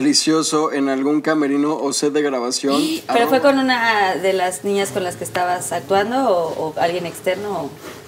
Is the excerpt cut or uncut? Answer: cut